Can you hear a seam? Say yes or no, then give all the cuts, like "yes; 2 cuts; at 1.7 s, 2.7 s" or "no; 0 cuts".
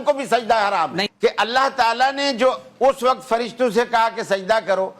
yes; 1 cut; at 1.0 s